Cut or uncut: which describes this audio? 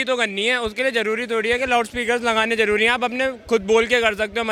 uncut